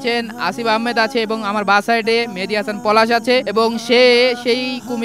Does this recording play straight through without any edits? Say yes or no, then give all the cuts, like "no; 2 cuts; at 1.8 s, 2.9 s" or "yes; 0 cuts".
yes; 0 cuts